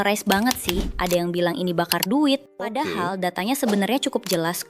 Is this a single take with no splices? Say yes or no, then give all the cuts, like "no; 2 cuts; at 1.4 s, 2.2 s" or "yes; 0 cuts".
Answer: no; 2 cuts; at 0.9 s, 2.8 s